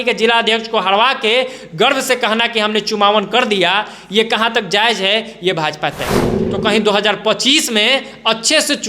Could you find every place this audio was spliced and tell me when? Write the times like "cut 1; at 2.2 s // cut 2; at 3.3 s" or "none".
cut 1; at 6.4 s